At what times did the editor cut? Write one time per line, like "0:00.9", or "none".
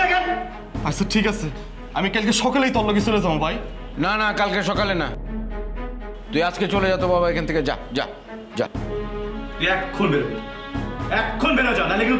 none

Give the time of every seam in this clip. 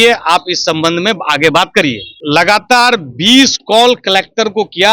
0:02.1

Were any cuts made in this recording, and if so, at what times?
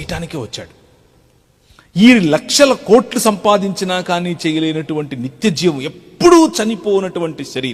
none

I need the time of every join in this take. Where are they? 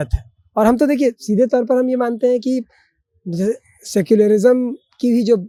none

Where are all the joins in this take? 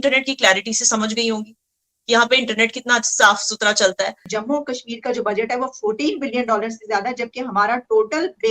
0:04.2

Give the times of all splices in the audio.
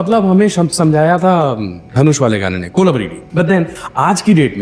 0:03.2

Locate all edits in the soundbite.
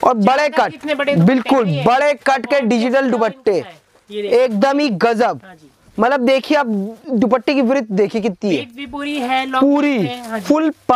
none

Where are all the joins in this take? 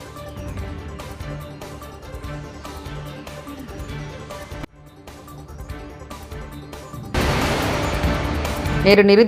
0:01.1

